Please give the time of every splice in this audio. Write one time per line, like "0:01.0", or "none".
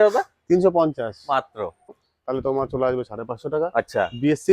0:02.0

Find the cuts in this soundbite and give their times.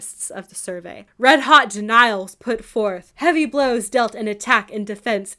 0:01.0
0:03.1

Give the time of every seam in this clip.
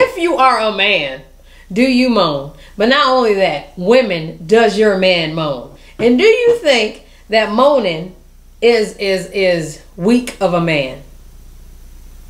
none

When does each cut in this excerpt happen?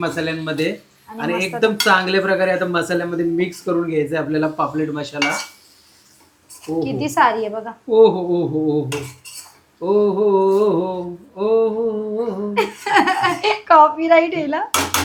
none

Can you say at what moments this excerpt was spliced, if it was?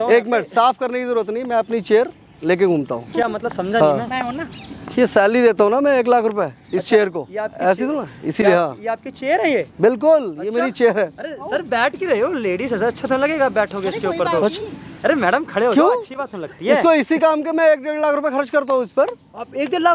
none

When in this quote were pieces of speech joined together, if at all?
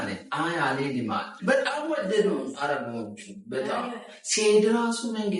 0:01.3

